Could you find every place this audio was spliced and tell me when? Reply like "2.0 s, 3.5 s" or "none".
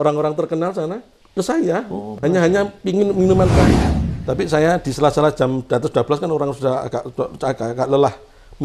1.1 s, 3.8 s